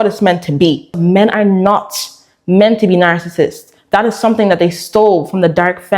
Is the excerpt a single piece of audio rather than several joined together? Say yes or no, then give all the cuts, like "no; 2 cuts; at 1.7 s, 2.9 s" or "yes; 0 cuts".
no; 1 cut; at 1.0 s